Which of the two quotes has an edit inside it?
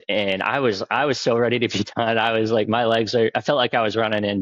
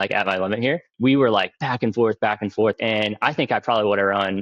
second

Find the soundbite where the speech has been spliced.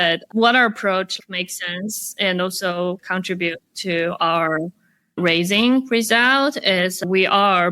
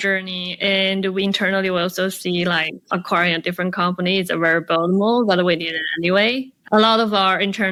first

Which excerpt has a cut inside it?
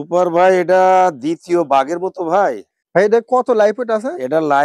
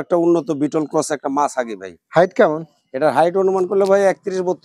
first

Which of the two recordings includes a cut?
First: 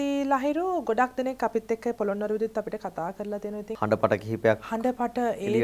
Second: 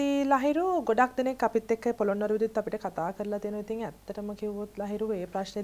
first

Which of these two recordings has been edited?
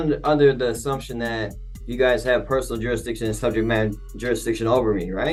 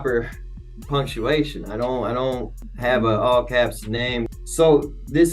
second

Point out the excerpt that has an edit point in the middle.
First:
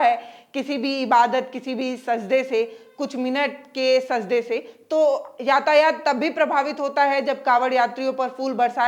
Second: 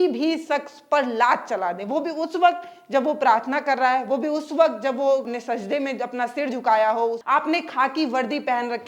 second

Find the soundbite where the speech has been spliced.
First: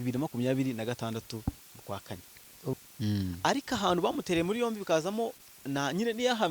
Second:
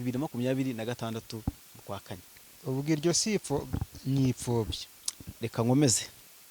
first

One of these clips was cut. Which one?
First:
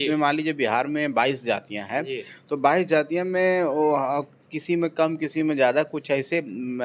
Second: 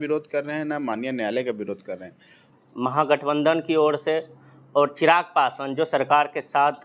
second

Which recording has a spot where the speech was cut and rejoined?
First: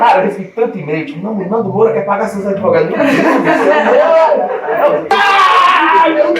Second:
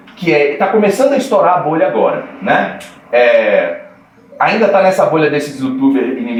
first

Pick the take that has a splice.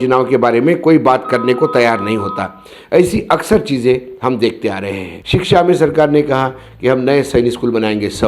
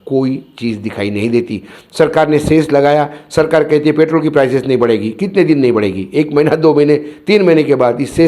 first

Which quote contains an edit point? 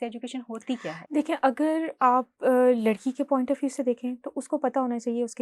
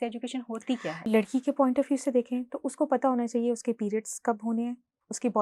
second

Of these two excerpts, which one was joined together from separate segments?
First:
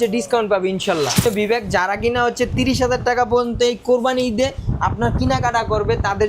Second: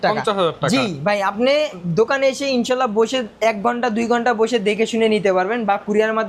first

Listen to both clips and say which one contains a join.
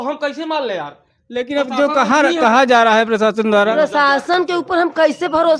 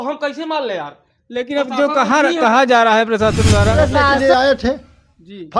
second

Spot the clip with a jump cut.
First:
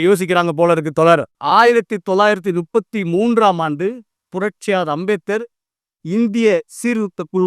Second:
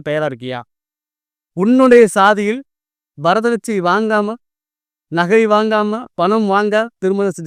first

